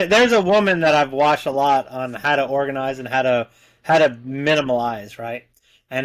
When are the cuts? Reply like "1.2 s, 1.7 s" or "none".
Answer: none